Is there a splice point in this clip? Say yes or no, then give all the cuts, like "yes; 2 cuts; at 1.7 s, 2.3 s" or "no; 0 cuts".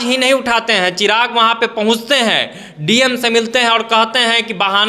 no; 0 cuts